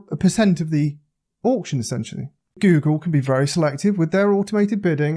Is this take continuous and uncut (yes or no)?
no